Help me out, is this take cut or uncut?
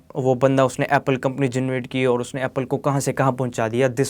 uncut